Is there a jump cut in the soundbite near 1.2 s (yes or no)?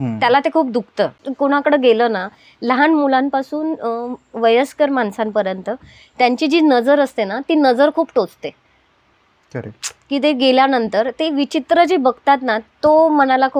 yes